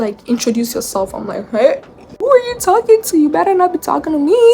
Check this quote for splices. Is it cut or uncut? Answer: cut